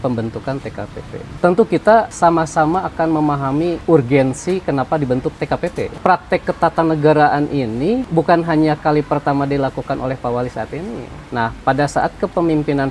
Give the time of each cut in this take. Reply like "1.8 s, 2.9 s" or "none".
1.2 s, 2.1 s, 3.8 s, 5.9 s, 8.1 s, 11.1 s